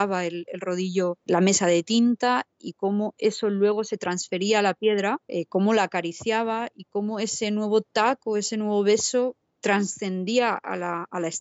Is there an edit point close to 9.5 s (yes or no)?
yes